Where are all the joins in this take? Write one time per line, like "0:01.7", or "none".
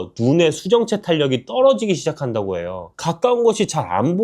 0:02.9

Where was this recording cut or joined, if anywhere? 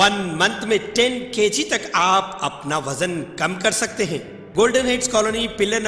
0:04.4

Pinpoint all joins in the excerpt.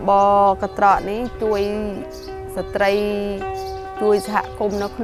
none

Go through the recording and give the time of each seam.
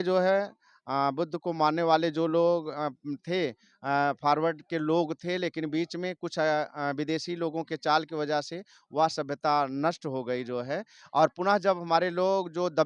none

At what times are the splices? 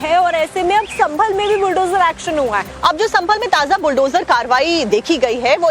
0:01.4

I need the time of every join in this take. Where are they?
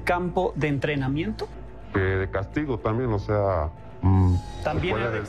0:01.6
0:03.8

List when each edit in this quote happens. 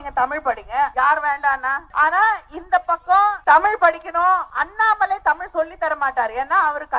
0:00.9
0:01.8
0:03.4
0:04.5

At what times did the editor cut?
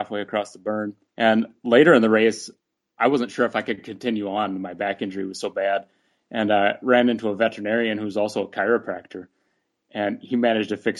0:01.0

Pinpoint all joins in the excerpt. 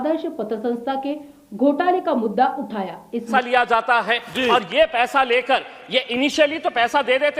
0:03.3

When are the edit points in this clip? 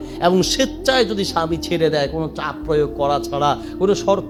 none

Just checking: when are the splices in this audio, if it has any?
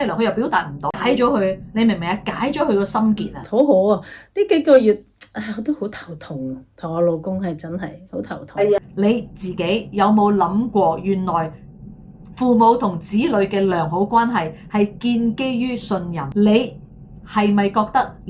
0:01.0
0:08.8
0:16.2

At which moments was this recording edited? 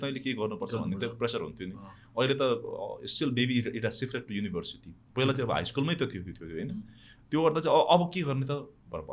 none

